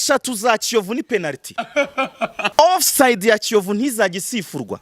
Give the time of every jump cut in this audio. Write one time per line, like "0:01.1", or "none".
0:02.5

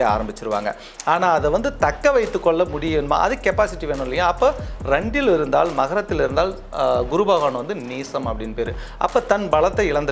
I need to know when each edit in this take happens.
none

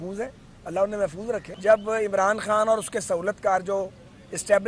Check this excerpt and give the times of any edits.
0:01.5

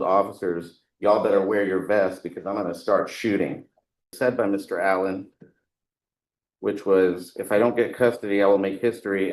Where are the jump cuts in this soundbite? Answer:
0:04.1

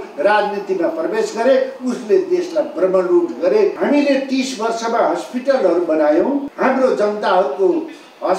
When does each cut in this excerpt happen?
0:03.8
0:06.5

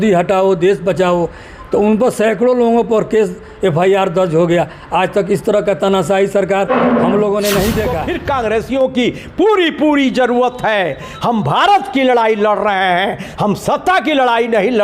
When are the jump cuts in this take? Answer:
0:08.0

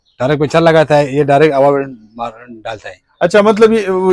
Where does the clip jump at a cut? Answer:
none

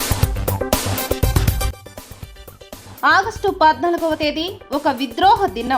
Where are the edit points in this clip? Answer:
0:02.8

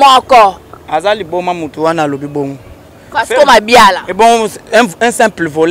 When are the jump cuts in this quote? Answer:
none

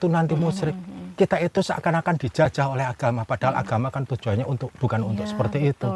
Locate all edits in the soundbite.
none

